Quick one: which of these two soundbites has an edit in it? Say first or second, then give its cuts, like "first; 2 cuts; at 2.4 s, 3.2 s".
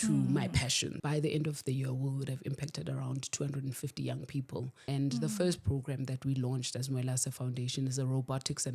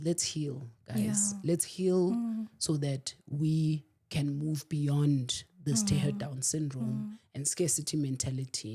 first; 2 cuts; at 1.0 s, 4.8 s